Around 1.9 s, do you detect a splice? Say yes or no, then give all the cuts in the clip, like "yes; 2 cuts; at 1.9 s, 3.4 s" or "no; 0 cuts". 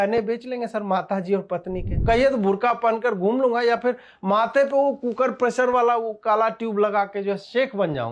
yes; 1 cut; at 1.9 s